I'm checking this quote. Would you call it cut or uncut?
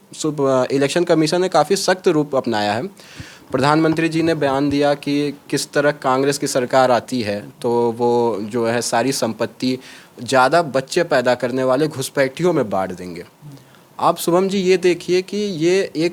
uncut